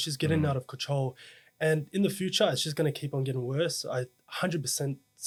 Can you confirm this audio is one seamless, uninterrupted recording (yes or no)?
yes